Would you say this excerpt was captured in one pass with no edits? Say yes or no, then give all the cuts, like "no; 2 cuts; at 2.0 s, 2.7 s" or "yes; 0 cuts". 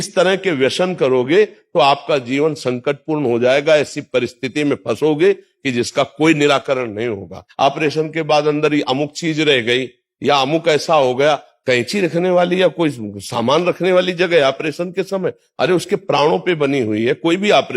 no; 2 cuts; at 7.4 s, 11.5 s